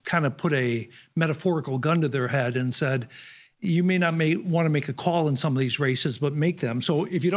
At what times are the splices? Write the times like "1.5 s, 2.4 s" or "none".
none